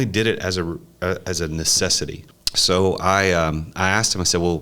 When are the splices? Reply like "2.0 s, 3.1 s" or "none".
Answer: 2.3 s